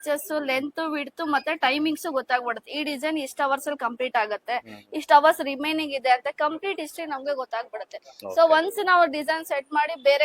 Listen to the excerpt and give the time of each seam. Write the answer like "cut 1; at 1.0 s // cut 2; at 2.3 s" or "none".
none